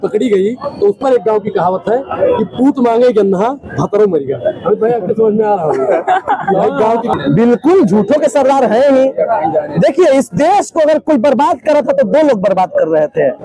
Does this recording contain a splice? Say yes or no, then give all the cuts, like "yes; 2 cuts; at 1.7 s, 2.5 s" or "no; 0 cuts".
yes; 1 cut; at 7.1 s